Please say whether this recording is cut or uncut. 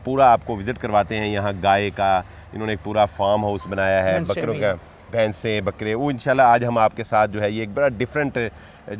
uncut